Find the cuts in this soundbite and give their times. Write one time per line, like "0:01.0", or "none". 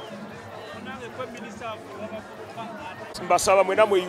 0:03.2